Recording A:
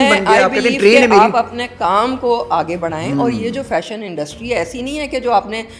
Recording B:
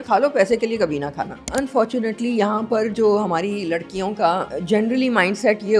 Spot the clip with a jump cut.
B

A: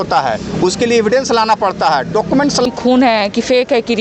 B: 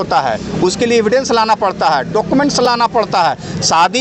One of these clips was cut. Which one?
A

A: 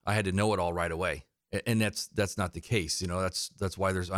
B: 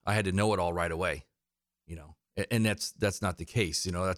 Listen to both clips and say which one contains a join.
A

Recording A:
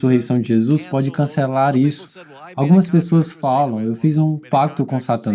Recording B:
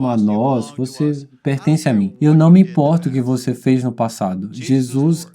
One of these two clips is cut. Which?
B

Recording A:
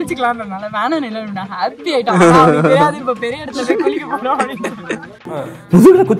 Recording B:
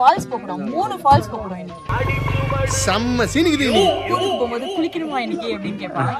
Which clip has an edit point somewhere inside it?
B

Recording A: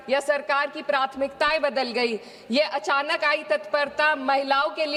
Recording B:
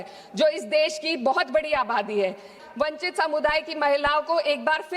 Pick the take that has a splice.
B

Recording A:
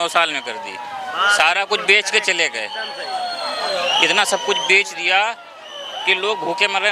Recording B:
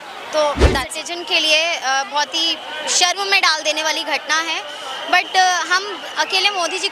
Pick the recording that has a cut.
B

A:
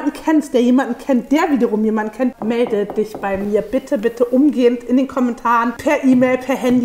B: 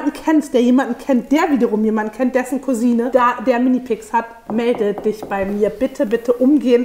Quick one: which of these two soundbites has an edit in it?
A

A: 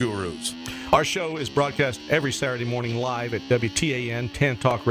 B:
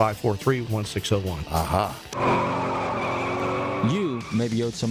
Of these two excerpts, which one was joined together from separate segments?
B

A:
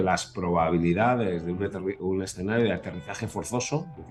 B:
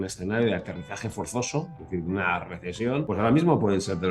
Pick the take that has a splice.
B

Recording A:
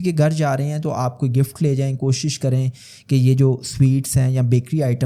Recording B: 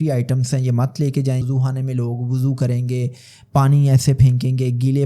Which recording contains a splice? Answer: B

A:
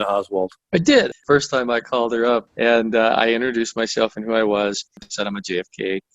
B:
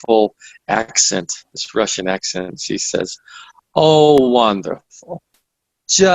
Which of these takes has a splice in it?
A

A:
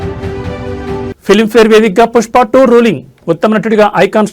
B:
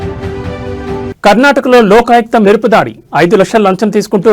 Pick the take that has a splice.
B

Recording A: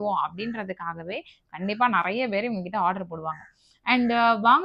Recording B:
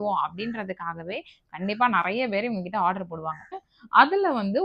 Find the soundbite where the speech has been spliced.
B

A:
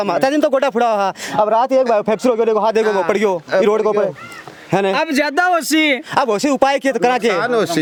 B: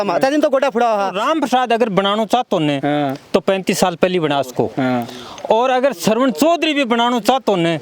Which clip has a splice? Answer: B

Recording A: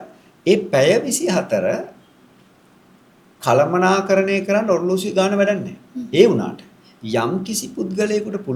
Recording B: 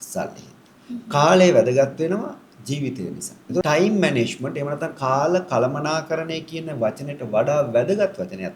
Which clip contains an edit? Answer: B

